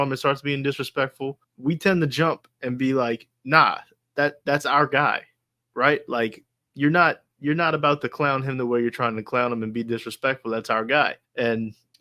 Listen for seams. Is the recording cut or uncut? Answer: uncut